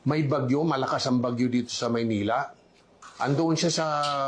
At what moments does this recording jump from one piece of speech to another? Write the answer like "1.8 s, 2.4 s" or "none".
2.5 s